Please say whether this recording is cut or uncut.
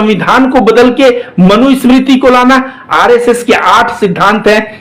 uncut